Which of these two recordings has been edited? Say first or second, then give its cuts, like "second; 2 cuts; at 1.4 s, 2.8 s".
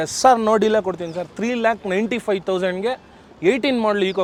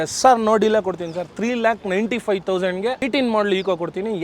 second; 1 cut; at 3.1 s